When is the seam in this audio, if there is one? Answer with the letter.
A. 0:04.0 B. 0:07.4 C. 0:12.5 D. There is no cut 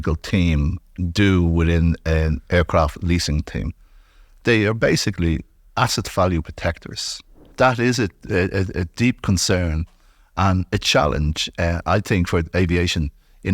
B